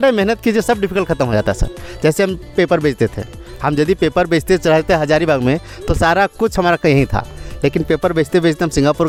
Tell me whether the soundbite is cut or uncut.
uncut